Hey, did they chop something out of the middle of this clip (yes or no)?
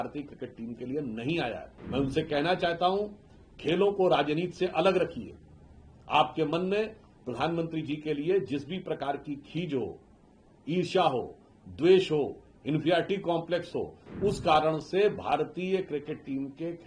yes